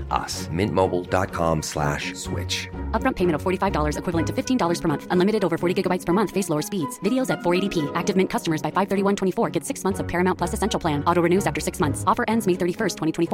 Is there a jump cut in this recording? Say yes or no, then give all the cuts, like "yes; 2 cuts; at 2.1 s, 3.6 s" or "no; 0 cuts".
no; 0 cuts